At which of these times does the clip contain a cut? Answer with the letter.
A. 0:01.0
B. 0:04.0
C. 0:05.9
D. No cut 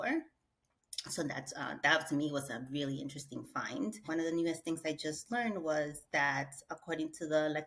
B